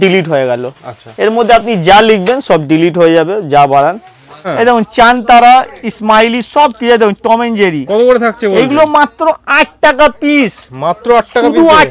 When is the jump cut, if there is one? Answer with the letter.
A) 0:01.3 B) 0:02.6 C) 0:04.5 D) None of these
C